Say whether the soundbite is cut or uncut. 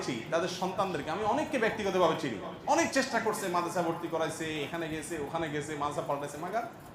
uncut